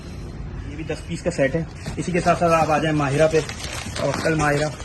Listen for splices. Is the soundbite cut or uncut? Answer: cut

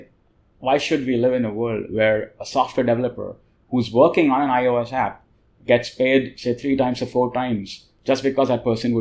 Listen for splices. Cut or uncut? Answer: uncut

